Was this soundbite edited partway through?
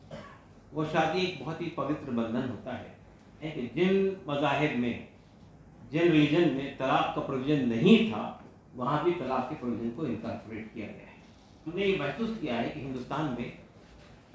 yes; 2 cuts; at 3.4 s, 11.7 s

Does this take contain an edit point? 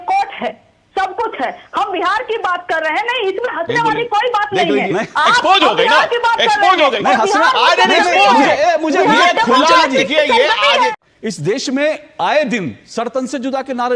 yes; 1 cut; at 10.9 s

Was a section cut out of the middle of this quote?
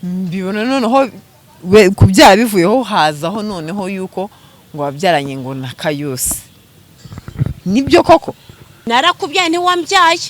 yes; 1 cut; at 8.7 s

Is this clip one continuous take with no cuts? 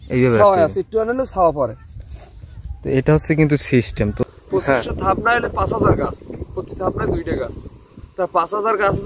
no; 1 cut; at 4.2 s

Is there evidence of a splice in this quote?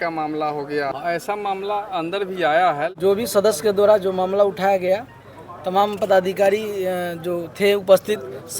yes; 2 cuts; at 0.9 s, 2.9 s

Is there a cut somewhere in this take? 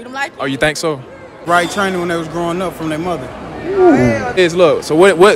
yes; 2 cuts; at 1.5 s, 4.4 s

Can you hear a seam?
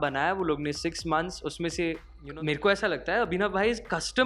yes; 1 cut; at 2.1 s

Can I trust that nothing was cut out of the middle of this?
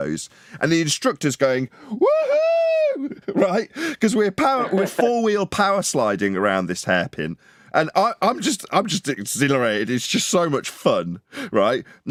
yes; 0 cuts

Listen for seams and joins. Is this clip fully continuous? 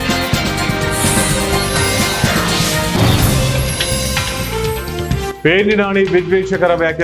no; 1 cut; at 5.3 s

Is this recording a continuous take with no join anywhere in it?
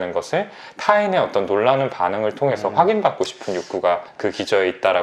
yes; 0 cuts

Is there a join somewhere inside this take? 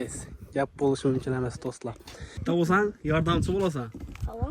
yes; 1 cut; at 2.4 s

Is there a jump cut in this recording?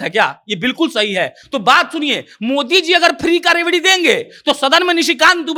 no; 0 cuts

